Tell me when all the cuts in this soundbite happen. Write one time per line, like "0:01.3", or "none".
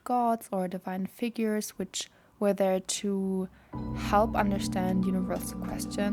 none